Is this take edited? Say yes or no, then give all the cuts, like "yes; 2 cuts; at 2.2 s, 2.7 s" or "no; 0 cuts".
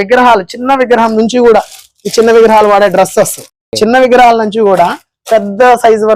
no; 0 cuts